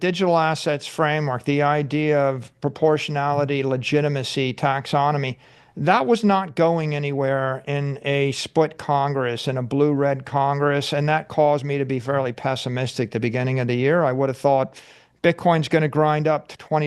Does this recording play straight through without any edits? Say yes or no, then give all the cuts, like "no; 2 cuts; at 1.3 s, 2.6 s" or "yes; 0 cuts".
yes; 0 cuts